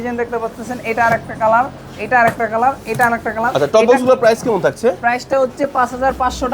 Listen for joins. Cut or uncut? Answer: uncut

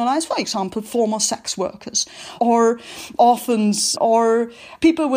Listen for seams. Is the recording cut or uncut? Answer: cut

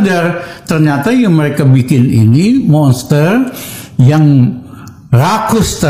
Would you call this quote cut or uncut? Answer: uncut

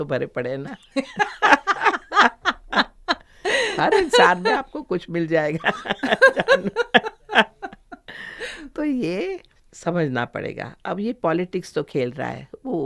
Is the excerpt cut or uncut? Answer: uncut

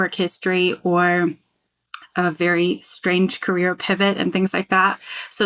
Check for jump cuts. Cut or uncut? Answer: uncut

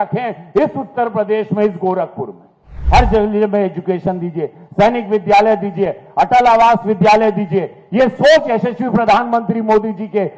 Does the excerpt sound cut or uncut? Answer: cut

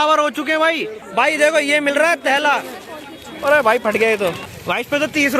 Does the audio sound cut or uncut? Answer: cut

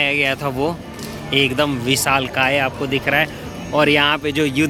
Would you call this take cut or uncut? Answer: uncut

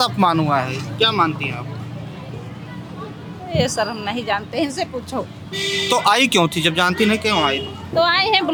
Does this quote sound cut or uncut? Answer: uncut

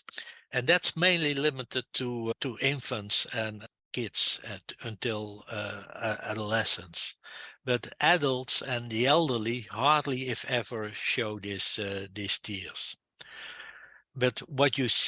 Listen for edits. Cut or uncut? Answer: cut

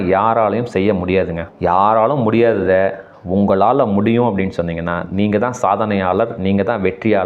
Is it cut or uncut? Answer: cut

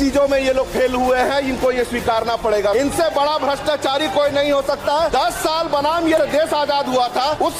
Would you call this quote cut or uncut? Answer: uncut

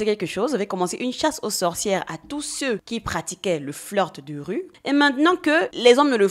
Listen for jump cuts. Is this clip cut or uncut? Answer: cut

